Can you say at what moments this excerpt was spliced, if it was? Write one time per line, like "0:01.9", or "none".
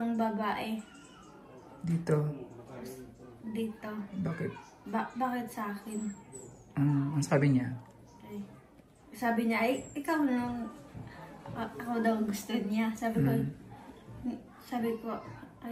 none